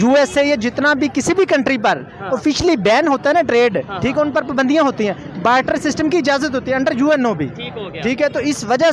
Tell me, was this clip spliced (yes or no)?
no